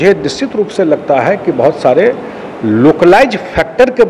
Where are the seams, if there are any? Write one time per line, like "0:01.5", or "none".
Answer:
none